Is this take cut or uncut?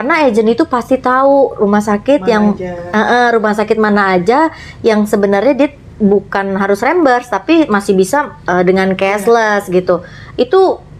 uncut